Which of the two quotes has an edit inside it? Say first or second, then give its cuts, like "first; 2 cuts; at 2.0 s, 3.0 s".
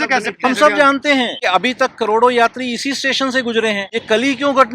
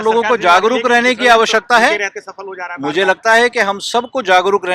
first; 2 cuts; at 1.4 s, 3.8 s